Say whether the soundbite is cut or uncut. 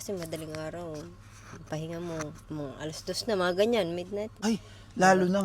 cut